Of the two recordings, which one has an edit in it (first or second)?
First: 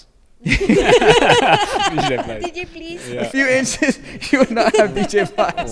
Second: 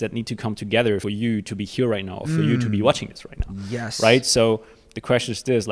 second